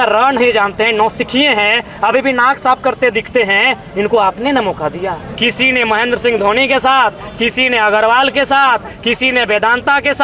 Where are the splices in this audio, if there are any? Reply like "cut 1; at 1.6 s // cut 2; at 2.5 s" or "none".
cut 1; at 5.2 s